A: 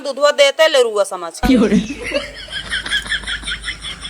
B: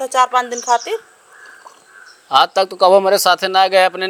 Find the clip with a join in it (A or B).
A